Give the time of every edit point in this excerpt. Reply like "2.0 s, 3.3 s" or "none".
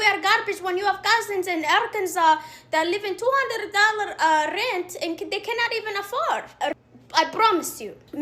6.7 s